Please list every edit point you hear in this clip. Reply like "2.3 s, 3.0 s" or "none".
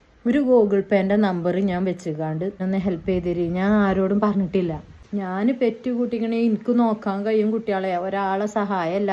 2.6 s, 5.0 s